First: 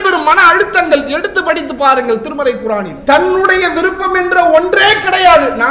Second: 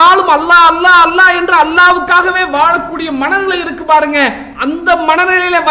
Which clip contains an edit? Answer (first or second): first